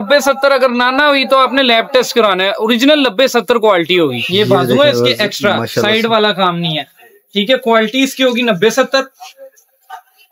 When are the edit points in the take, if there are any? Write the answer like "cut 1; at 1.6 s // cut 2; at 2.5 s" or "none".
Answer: cut 1; at 4.2 s